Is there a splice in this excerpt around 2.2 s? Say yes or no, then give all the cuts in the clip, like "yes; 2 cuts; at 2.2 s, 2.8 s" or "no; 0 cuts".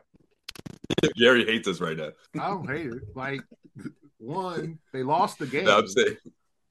yes; 1 cut; at 2.2 s